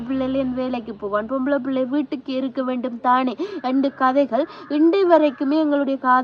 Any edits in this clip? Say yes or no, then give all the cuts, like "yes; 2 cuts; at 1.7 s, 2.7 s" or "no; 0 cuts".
no; 0 cuts